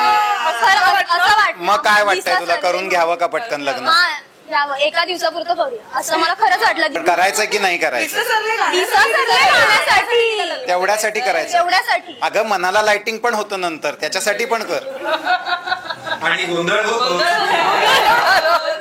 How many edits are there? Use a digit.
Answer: 1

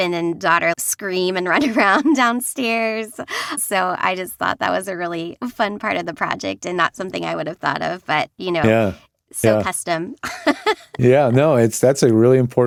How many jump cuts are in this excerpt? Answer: 0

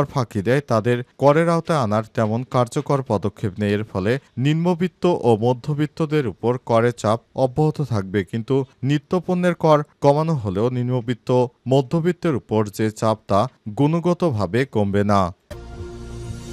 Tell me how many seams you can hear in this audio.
1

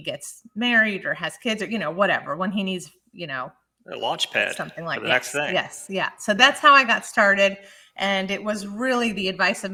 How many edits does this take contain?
0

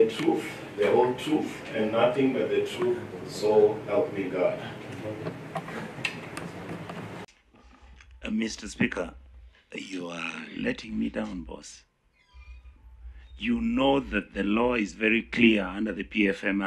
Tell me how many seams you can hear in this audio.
1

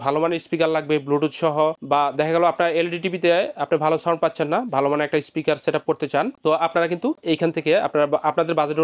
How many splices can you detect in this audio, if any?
1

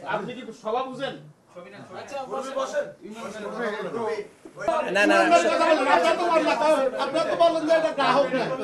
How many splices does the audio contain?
1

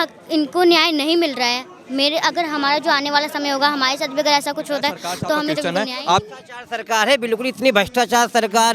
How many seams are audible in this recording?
1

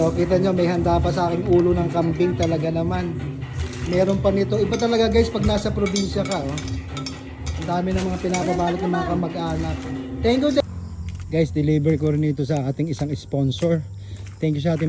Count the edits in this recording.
1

